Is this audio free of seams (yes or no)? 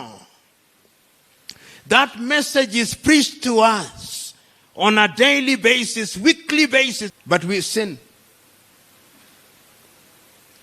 no